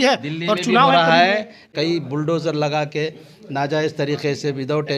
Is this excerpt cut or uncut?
cut